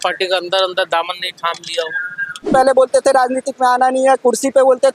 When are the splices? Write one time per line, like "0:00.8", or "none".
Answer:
0:02.5